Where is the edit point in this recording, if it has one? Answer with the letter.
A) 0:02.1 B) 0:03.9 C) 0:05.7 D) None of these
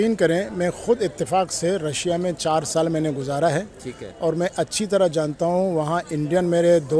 D